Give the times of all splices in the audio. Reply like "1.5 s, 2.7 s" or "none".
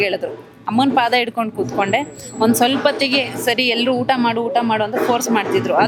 none